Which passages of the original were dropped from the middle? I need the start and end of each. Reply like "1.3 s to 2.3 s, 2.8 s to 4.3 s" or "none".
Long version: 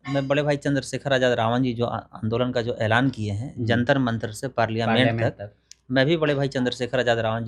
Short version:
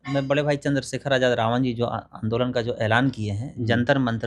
none